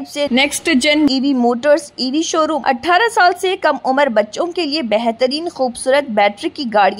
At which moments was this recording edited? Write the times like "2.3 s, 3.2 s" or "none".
2.6 s

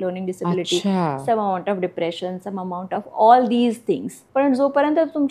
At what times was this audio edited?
4.2 s

